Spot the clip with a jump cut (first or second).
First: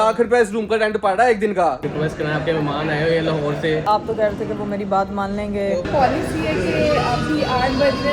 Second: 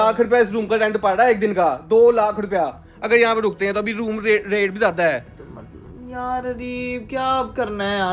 first